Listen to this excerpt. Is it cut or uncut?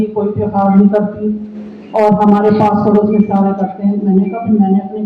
uncut